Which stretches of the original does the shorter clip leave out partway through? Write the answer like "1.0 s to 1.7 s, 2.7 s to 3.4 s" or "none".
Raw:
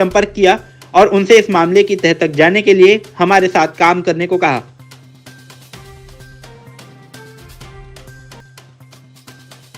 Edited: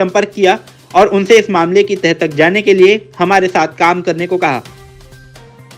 4.6 s to 5.7 s